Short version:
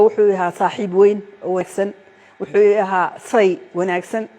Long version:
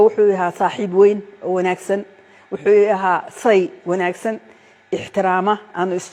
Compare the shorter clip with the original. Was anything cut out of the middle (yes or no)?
yes